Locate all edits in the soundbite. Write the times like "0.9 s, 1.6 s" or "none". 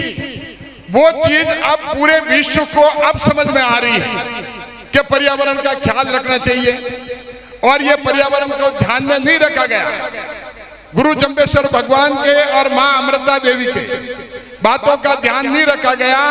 none